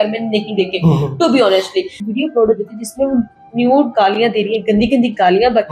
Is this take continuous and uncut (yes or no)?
no